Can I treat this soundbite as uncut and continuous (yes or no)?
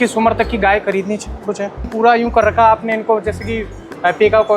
no